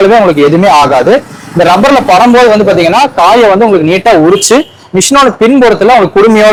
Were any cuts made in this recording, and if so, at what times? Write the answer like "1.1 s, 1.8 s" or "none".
none